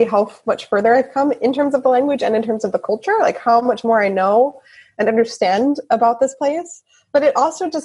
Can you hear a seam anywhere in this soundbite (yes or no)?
no